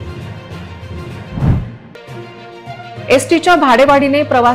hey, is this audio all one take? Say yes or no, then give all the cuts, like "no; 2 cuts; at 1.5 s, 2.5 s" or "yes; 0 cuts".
no; 1 cut; at 1.3 s